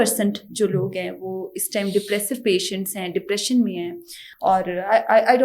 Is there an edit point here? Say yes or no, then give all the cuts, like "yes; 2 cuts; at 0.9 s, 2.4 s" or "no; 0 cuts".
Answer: no; 0 cuts